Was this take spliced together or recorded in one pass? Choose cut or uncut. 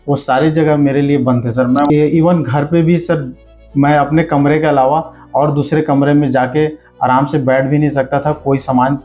cut